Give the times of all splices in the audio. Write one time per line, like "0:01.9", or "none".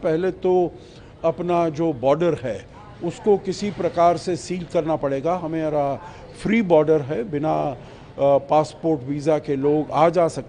none